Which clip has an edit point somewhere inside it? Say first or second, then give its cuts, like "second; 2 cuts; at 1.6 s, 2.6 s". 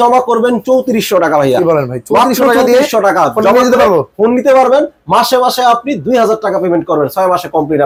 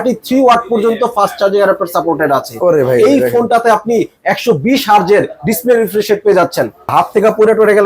second; 1 cut; at 6.9 s